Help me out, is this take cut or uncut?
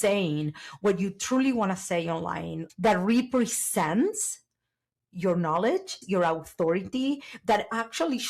cut